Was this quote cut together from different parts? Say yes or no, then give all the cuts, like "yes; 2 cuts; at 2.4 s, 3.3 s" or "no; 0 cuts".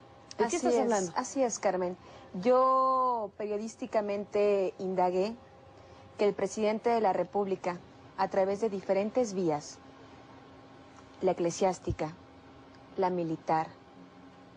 no; 0 cuts